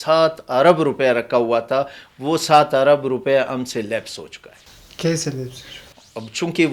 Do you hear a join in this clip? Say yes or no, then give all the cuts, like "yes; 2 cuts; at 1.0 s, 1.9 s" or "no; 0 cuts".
no; 0 cuts